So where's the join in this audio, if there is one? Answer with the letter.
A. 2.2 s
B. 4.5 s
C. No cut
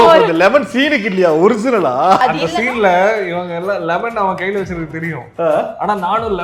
A